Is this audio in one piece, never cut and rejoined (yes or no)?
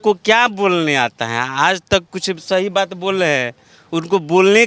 yes